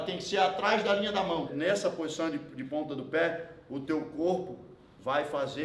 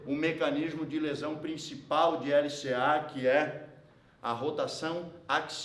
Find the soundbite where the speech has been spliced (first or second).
first